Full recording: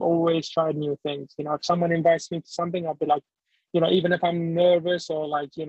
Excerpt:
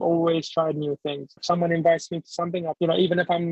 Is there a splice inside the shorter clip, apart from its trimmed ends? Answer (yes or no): yes